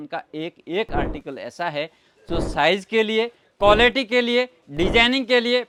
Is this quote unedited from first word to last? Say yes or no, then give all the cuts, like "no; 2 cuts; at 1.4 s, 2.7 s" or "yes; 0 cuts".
yes; 0 cuts